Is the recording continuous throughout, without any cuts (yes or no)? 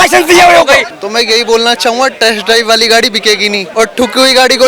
no